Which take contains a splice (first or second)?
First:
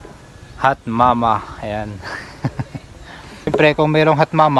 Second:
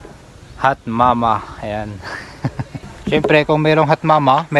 second